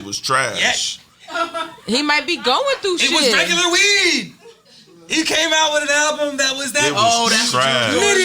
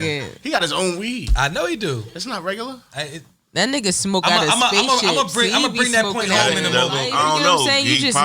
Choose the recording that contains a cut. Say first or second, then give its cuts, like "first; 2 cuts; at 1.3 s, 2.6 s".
second; 1 cut; at 7.1 s